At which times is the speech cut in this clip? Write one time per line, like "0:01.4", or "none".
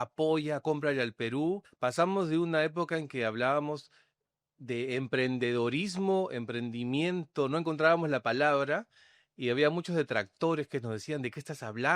0:01.7